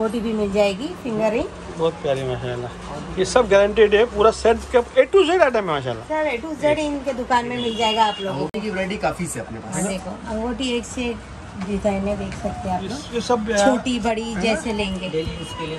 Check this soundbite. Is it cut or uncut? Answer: uncut